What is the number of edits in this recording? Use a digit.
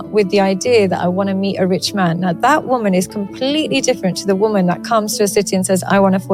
0